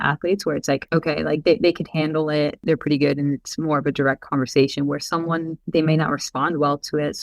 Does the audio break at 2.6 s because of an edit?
yes; 3 cuts; at 0.8 s, 2.6 s, 5.6 s

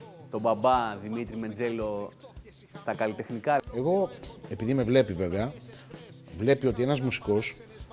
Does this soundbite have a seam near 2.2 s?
no; 1 cut; at 3.6 s

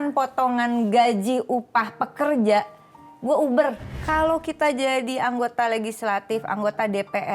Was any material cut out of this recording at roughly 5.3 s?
no; 1 cut; at 3.9 s

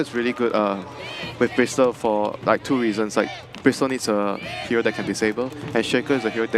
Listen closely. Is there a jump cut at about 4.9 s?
yes; 1 cut; at 4.9 s

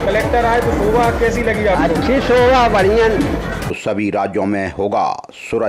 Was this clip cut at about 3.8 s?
yes; 1 cut; at 3.8 s

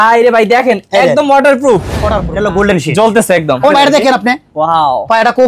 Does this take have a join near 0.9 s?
no; 2 cuts; at 2.2 s, 3.7 s

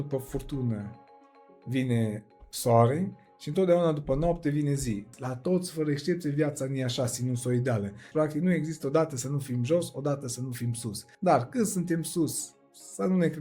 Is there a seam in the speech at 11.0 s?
yes; 3 cuts; at 5.1 s, 8.0 s, 11.0 s

